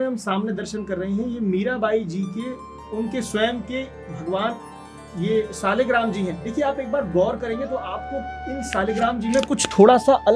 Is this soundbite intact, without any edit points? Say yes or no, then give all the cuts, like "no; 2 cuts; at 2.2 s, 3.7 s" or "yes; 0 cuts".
yes; 0 cuts